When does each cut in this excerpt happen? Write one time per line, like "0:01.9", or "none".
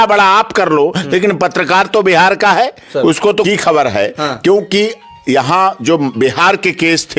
0:03.4